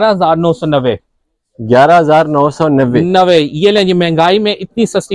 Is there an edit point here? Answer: no; 0 cuts

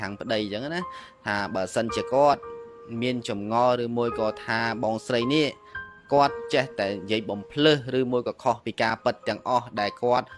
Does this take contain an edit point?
no; 0 cuts

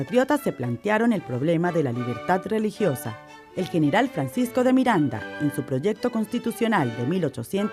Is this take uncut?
no; 1 cut; at 1.3 s

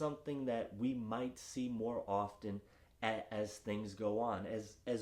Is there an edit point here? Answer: no; 0 cuts

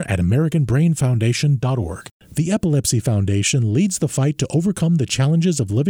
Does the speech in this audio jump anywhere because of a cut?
yes; 1 cut; at 2.1 s

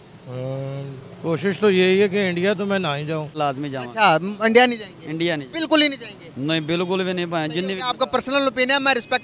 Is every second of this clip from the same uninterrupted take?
no; 1 cut; at 3.3 s

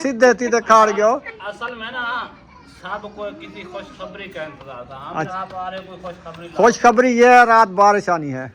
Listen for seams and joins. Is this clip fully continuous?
no; 1 cut; at 5.3 s

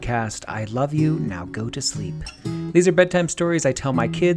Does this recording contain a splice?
no; 0 cuts

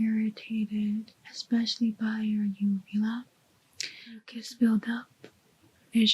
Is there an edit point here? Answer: yes; 1 cut; at 4.3 s

